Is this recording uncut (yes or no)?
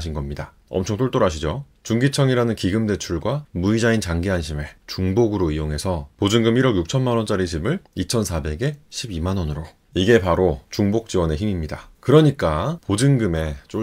no